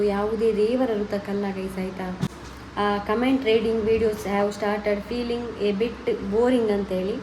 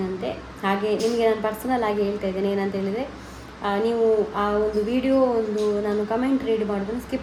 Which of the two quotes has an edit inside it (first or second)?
first